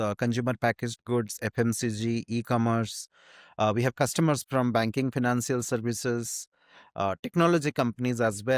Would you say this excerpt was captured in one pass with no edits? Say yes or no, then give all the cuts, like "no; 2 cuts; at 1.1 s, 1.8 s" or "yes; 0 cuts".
yes; 0 cuts